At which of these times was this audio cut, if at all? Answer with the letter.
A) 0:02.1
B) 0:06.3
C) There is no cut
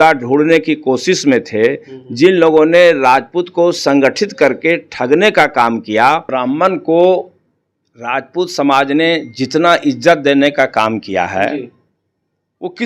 B